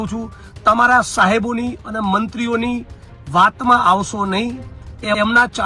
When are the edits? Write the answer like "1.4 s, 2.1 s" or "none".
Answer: none